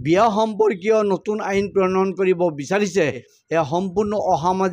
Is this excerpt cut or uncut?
cut